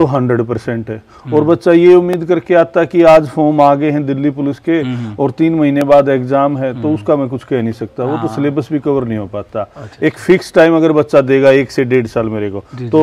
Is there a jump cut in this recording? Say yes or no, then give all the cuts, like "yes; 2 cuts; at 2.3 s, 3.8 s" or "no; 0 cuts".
no; 0 cuts